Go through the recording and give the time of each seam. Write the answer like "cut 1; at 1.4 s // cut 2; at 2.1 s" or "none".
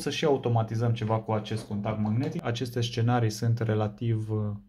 cut 1; at 2.4 s